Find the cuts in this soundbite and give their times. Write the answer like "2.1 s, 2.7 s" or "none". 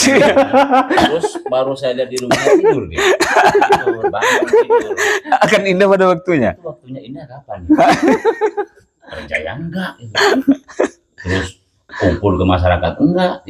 none